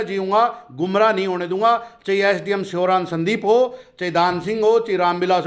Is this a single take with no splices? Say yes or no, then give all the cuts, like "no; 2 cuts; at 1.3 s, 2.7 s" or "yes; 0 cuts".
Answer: yes; 0 cuts